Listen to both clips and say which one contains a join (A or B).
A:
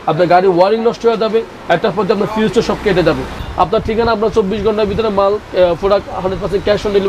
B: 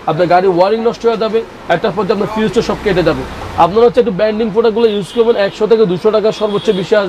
A